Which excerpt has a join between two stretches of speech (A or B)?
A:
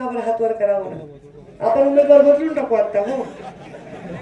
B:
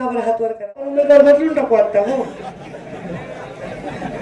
B